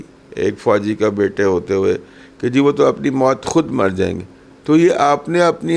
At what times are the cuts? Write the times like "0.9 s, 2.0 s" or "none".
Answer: none